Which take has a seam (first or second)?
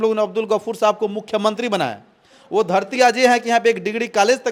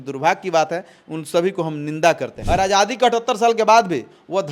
second